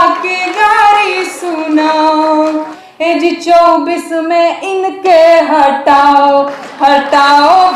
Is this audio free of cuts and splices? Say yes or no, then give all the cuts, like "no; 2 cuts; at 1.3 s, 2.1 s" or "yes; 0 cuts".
no; 1 cut; at 2.8 s